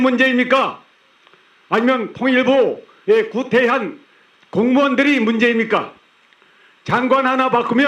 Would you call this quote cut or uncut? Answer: uncut